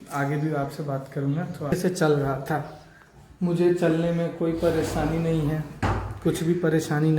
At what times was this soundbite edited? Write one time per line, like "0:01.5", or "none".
0:01.7

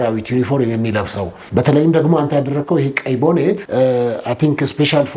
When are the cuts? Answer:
0:01.4
0:03.6

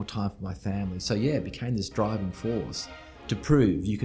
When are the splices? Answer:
none

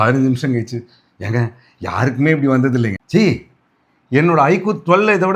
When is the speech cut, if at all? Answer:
0:03.0

